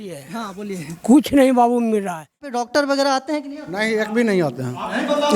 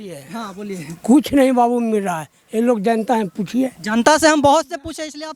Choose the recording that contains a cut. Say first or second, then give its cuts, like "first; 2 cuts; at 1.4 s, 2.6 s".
first; 1 cut; at 2.5 s